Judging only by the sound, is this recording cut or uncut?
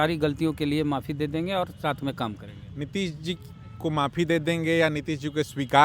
uncut